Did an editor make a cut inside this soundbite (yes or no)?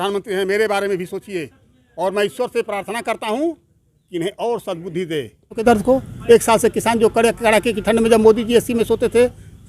yes